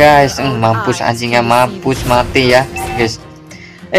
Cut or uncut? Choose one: cut